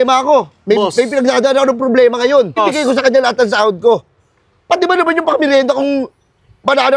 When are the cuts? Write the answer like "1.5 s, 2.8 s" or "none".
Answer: 2.6 s